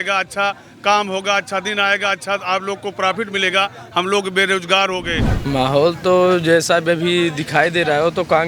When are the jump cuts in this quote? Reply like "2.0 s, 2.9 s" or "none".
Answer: 5.3 s